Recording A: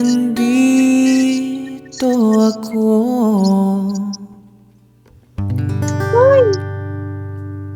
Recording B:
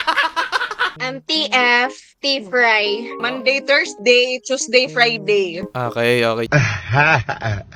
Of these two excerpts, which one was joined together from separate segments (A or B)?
B